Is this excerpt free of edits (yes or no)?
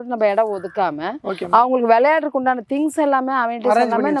yes